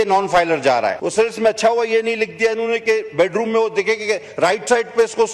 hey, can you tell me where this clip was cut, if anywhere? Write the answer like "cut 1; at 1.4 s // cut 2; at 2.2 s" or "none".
cut 1; at 1.0 s